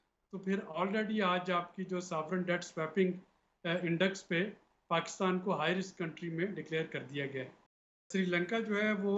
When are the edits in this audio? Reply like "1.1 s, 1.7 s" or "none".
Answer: 8.0 s

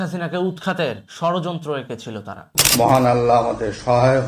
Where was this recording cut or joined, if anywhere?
2.5 s

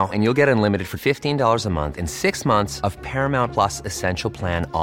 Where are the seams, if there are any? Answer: none

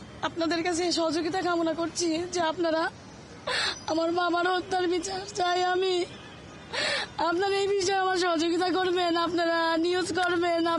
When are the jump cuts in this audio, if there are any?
none

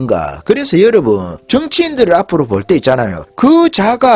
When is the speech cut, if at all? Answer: 1.3 s, 3.2 s

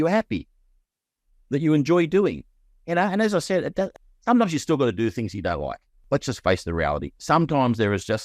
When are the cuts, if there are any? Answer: 4.0 s, 5.9 s

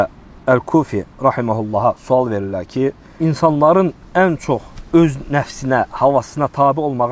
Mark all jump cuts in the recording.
3.1 s, 4.7 s

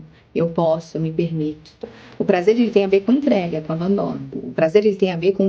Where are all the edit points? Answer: 4.4 s

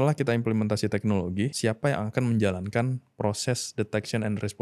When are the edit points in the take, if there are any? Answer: 1.5 s

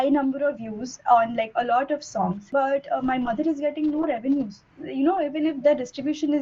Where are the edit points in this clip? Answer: 2.5 s

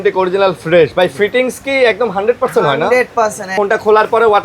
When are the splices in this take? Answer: 3.5 s

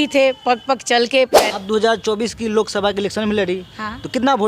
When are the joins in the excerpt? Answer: 1.3 s

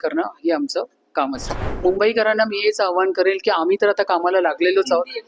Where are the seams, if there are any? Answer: 1.5 s

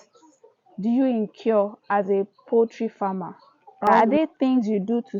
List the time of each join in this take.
3.9 s

